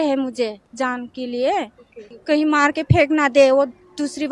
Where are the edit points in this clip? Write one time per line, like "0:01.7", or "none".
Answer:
0:02.1